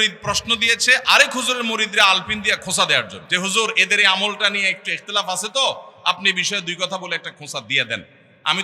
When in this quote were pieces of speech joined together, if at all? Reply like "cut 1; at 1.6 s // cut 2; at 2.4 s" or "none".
cut 1; at 3.2 s